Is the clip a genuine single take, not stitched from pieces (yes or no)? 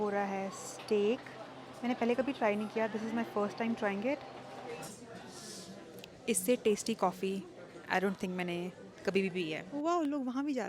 no